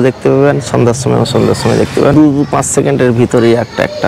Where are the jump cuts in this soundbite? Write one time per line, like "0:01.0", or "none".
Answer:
0:02.1